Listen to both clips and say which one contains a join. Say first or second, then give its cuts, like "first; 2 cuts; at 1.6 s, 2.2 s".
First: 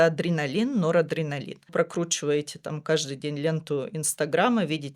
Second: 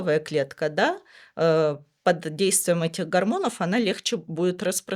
first; 1 cut; at 1.6 s